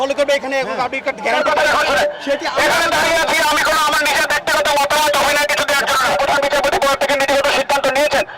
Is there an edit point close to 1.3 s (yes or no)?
yes